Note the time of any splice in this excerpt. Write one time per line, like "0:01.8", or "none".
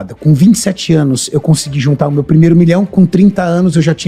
none

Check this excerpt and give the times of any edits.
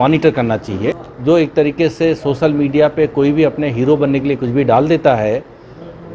0:01.1

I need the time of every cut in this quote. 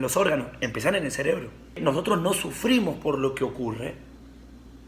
0:01.6

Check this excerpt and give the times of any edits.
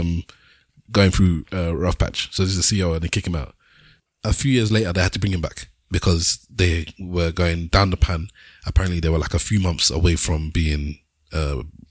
0:04.0

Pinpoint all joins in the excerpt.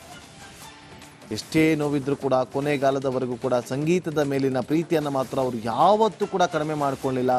0:01.3

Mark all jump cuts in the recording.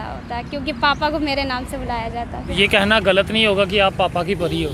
0:02.4

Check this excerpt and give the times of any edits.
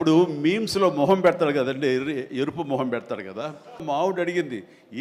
0:03.8

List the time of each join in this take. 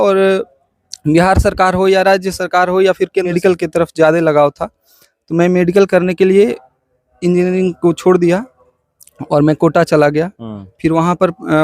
0:03.3

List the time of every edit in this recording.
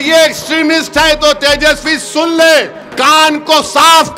0:02.8

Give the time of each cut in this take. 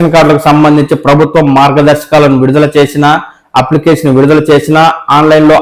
none

